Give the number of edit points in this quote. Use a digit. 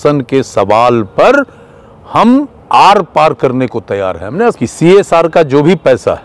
1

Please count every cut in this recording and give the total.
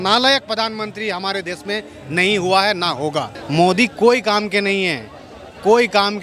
1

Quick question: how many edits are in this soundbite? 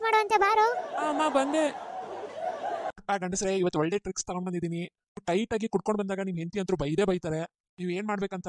1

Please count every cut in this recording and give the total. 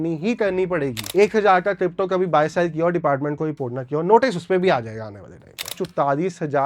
2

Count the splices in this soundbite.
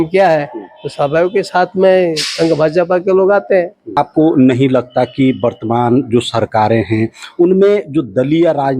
1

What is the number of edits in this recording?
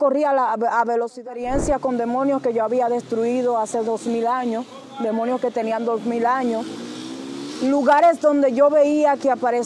1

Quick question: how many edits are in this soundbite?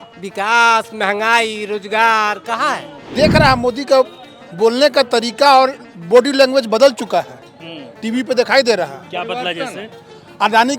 1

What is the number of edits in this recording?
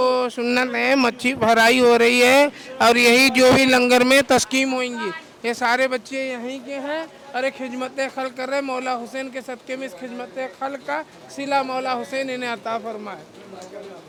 0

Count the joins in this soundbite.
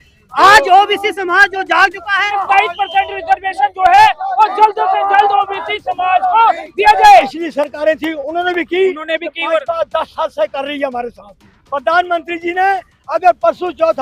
2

